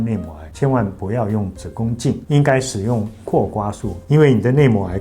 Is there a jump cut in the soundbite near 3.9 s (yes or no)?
yes